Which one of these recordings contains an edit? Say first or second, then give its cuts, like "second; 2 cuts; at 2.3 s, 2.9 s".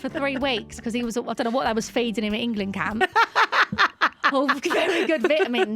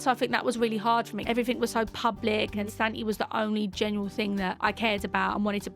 second; 3 cuts; at 1.2 s, 2.7 s, 4.6 s